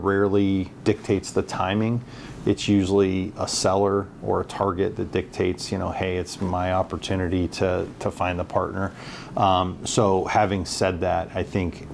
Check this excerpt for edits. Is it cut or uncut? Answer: uncut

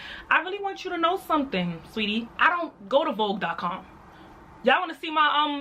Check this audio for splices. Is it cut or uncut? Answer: cut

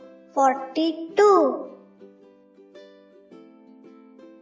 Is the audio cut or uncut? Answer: uncut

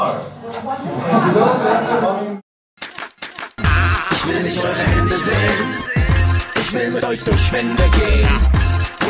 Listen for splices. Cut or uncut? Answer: cut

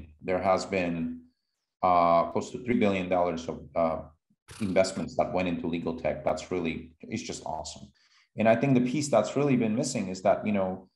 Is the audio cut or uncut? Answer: cut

